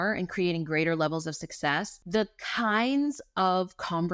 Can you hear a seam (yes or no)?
yes